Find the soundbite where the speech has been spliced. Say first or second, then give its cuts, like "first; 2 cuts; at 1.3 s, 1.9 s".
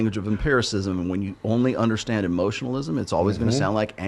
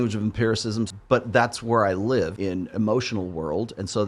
second; 2 cuts; at 0.9 s, 2.4 s